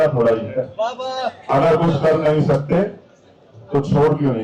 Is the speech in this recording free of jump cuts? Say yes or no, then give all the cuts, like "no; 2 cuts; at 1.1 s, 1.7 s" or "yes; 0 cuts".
yes; 0 cuts